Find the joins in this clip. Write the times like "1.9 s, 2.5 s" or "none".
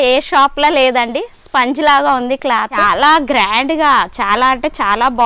2.7 s